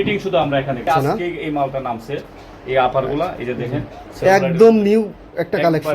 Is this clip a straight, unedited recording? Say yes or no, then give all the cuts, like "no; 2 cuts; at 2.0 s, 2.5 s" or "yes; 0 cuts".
no; 2 cuts; at 0.9 s, 4.0 s